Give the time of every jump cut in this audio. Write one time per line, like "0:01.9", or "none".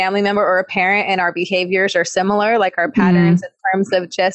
none